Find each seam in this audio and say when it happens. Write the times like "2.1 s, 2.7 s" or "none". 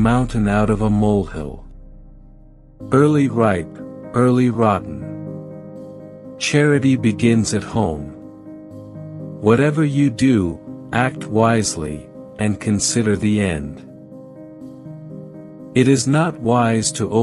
14.1 s, 15.6 s